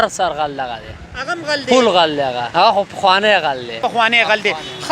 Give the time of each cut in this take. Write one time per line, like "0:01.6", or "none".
0:02.4
0:03.7